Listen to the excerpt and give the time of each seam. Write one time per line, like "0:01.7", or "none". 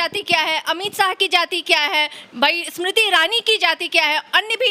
none